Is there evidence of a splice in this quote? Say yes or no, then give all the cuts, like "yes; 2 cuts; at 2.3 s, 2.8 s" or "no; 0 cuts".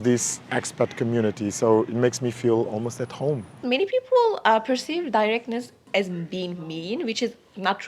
yes; 2 cuts; at 3.6 s, 5.9 s